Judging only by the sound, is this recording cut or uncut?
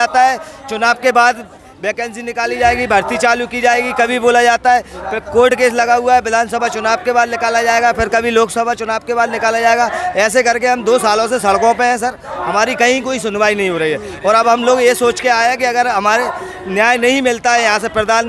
uncut